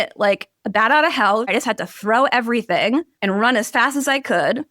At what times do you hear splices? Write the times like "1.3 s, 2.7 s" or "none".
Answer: 1.5 s, 3.1 s